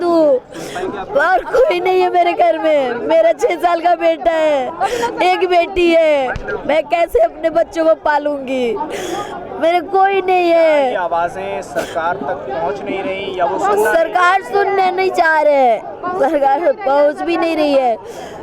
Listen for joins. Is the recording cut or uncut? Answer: uncut